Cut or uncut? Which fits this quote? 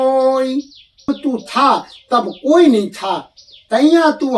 cut